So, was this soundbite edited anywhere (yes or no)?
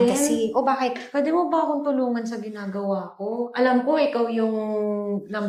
no